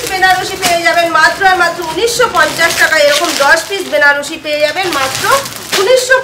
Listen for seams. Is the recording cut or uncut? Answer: uncut